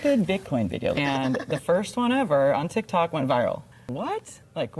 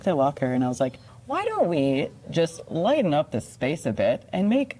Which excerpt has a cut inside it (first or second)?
first